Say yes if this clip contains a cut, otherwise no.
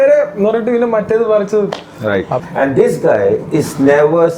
yes